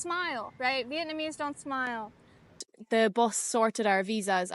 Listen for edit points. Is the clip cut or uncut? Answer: cut